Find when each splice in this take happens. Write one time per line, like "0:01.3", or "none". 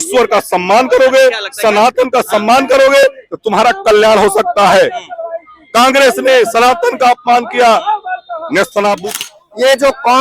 0:09.2